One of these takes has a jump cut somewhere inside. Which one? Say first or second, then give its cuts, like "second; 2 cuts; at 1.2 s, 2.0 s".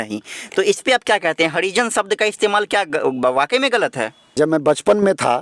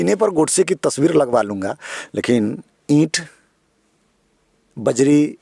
first; 1 cut; at 4.4 s